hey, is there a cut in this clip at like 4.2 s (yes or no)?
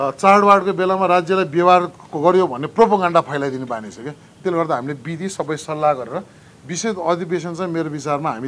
no